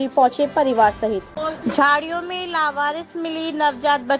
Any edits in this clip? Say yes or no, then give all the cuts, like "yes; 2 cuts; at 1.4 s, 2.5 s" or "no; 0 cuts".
yes; 1 cut; at 1.3 s